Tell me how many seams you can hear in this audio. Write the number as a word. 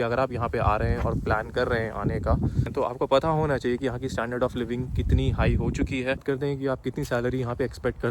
two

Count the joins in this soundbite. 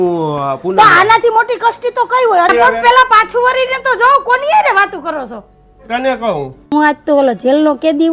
two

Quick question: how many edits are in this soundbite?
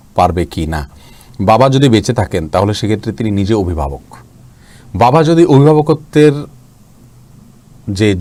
zero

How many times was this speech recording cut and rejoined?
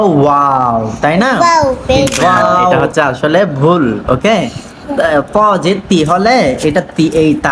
one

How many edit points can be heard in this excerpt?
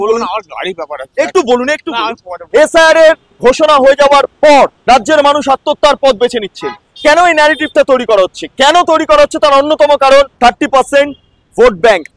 four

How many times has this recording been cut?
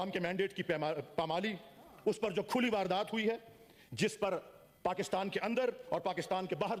zero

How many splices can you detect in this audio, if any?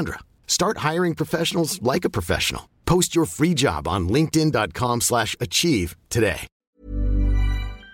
one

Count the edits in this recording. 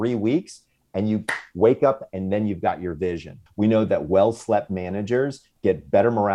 two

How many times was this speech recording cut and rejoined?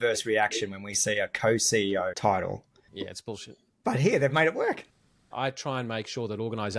one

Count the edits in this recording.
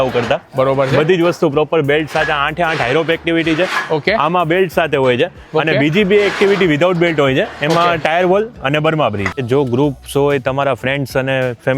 one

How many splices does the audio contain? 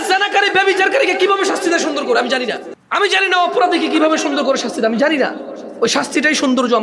one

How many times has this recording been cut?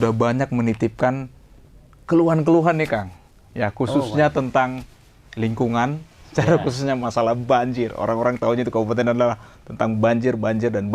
zero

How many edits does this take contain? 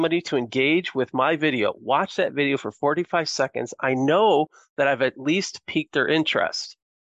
zero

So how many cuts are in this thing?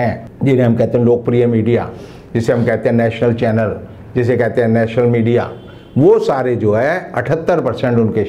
zero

